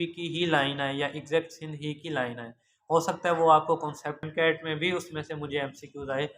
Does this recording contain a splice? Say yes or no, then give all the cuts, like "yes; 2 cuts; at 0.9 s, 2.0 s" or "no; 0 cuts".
yes; 1 cut; at 4.3 s